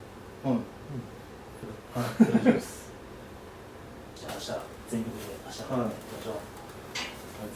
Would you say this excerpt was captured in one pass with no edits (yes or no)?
no